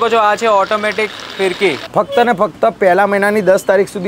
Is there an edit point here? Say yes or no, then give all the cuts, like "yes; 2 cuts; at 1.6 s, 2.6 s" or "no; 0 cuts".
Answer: yes; 1 cut; at 1.8 s